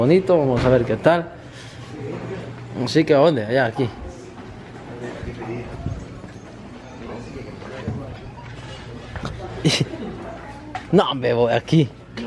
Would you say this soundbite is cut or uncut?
uncut